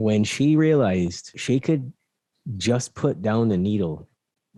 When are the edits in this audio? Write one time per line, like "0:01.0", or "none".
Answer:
0:01.3

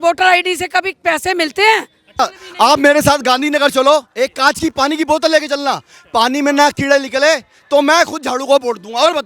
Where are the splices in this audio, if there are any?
0:02.2

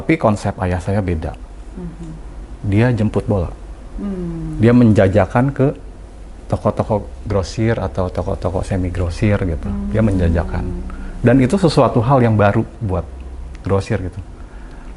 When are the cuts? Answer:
none

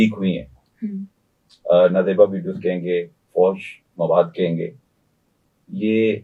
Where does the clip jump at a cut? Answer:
none

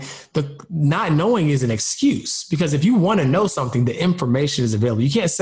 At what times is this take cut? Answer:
none

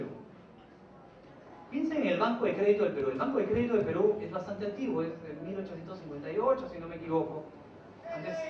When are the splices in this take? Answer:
none

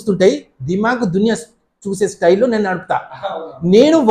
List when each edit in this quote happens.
none

